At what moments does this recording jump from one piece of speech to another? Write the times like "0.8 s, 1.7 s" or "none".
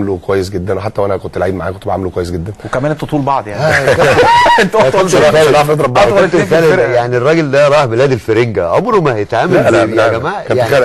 9.9 s